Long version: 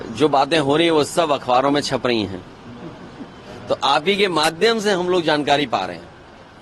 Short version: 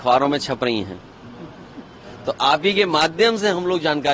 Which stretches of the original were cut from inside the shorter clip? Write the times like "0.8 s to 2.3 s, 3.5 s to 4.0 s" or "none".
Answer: none

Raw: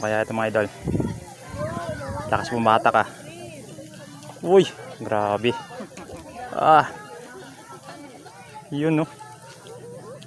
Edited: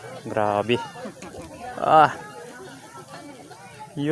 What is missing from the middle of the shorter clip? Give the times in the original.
none

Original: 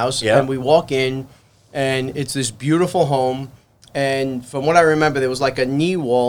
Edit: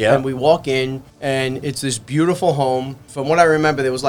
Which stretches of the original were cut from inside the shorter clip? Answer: 1.3 s to 1.6 s, 3.6 s to 4.4 s

